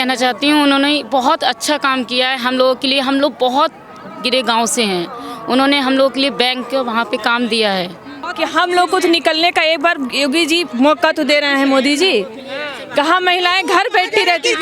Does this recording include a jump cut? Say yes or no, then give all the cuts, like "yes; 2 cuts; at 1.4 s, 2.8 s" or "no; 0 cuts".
yes; 1 cut; at 8.2 s